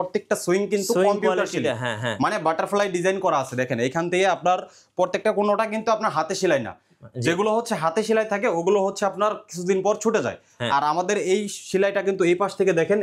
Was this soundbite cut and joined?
no; 0 cuts

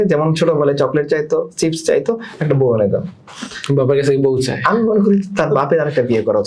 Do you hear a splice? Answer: no; 0 cuts

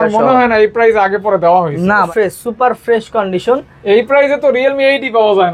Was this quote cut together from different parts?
yes; 1 cut; at 2.1 s

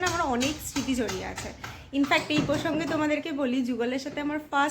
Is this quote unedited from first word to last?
yes; 0 cuts

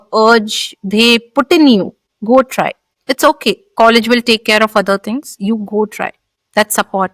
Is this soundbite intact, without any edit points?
yes; 0 cuts

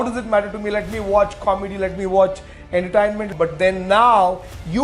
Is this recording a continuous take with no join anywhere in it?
no; 1 cut; at 3.3 s

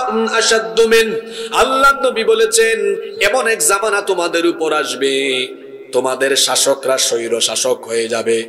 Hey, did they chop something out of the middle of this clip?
no; 0 cuts

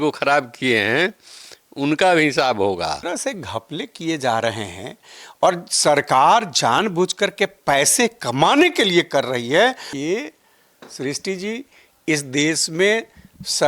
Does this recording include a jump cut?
yes; 2 cuts; at 3.1 s, 9.9 s

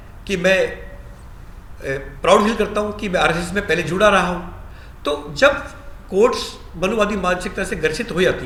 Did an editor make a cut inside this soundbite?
no; 0 cuts

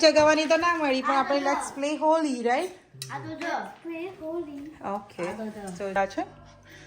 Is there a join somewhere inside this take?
yes; 1 cut; at 6.0 s

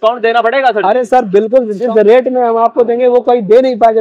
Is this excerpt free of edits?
no; 1 cut; at 1.8 s

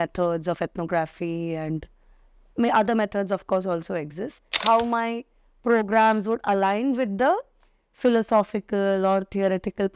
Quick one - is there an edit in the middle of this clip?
yes; 1 cut; at 4.6 s

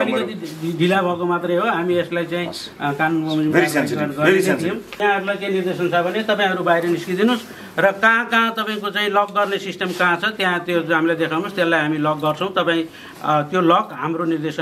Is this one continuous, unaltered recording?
no; 1 cut; at 5.0 s

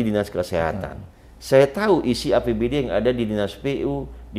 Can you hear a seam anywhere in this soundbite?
no; 0 cuts

